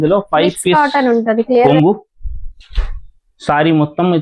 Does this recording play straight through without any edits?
no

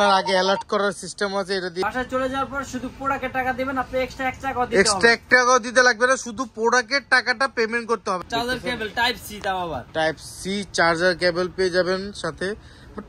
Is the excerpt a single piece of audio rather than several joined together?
no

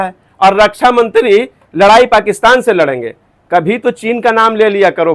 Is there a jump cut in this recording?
no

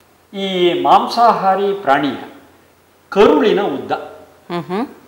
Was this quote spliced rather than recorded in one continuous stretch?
no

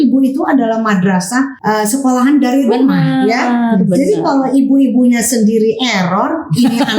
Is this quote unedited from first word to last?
no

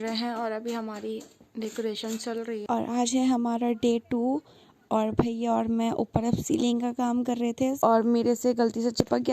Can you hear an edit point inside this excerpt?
yes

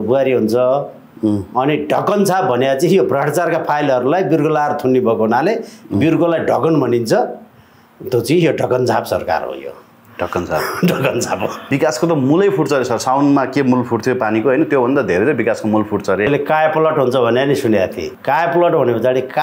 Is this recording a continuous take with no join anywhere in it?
no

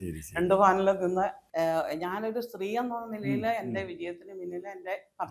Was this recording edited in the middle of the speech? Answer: yes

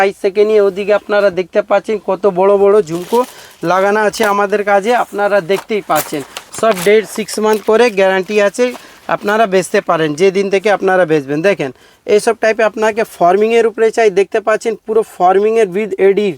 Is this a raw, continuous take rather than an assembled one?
yes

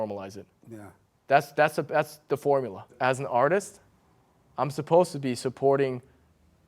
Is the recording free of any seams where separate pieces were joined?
no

